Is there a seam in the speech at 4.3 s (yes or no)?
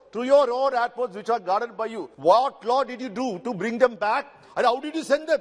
no